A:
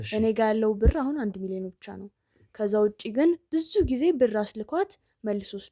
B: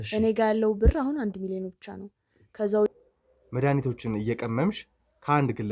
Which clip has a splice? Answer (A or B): B